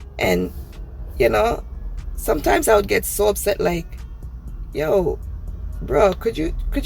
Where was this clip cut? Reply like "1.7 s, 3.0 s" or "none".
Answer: none